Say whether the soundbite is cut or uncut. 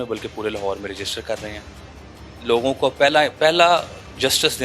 uncut